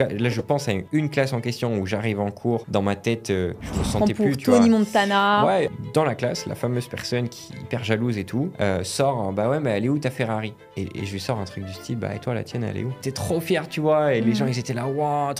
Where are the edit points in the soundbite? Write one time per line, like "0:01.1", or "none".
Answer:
0:05.7
0:08.5
0:13.1